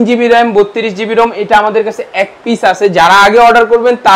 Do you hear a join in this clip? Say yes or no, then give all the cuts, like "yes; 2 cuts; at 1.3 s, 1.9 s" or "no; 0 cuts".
no; 0 cuts